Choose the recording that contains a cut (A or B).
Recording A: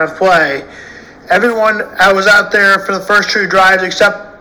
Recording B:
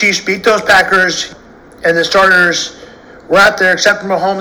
B